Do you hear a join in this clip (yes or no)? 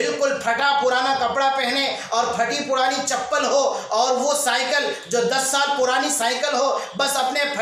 no